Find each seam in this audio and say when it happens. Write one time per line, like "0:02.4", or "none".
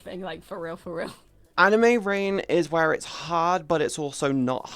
0:01.4